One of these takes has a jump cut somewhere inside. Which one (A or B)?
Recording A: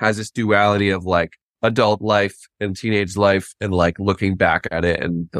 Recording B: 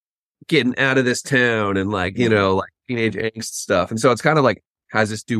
A